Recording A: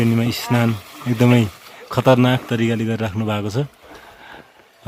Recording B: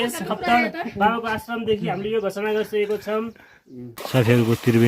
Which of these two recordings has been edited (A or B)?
B